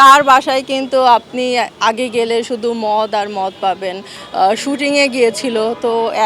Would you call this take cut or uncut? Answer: cut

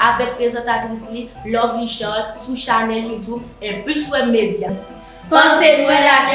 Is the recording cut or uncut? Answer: cut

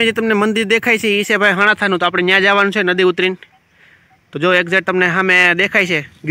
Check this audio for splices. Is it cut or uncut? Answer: uncut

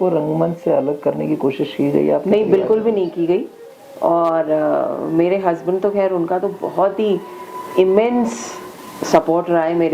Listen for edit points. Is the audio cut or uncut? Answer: uncut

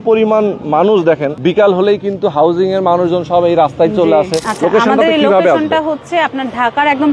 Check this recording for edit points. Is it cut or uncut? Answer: cut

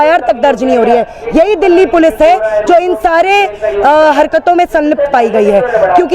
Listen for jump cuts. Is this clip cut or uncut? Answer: uncut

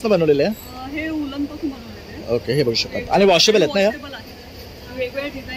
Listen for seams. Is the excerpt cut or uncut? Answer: uncut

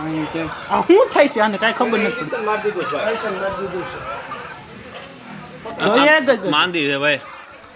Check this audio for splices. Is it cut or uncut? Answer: uncut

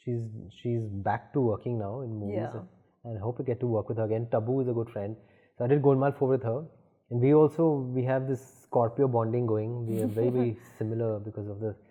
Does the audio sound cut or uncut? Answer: uncut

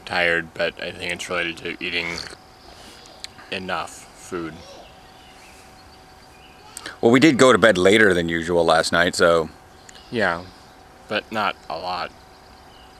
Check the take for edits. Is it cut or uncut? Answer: uncut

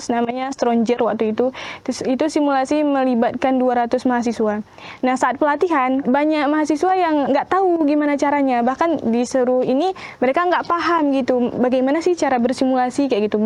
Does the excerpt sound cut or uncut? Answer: cut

